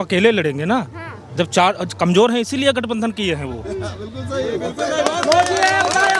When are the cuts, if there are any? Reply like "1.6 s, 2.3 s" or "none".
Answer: none